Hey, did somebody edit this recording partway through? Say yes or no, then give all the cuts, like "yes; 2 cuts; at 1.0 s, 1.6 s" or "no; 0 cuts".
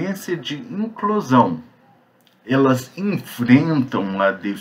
no; 0 cuts